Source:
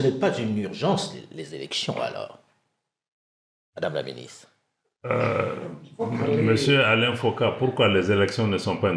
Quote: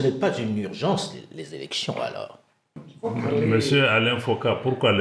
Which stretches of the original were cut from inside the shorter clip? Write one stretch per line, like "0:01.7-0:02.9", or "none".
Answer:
0:02.8-0:05.8